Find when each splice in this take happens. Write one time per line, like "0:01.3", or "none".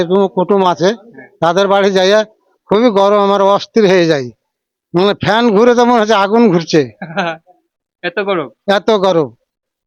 none